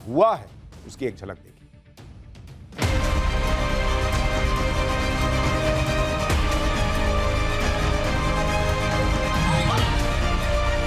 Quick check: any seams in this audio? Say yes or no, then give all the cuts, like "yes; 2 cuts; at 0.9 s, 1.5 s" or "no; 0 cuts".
yes; 1 cut; at 9.7 s